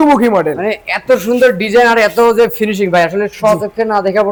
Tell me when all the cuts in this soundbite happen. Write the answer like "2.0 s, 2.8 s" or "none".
none